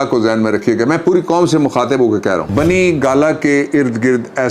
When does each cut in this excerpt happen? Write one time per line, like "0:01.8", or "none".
0:02.5